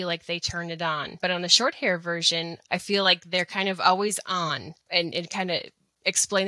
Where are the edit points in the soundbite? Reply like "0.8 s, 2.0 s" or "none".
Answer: 1.1 s, 2.6 s, 4.7 s